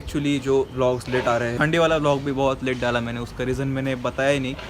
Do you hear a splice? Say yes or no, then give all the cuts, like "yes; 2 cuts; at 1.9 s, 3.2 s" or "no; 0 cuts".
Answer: yes; 1 cut; at 1.5 s